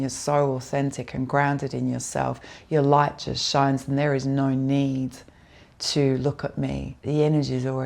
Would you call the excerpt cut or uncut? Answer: cut